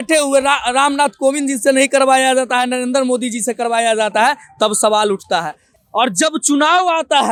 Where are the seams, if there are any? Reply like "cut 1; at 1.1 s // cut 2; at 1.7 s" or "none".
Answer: none

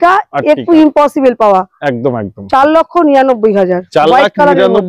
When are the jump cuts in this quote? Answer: none

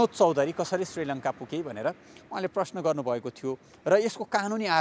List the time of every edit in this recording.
none

